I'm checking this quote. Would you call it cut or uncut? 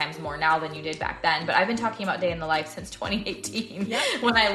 uncut